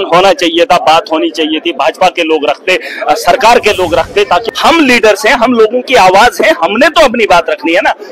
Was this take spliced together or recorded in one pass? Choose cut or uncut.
cut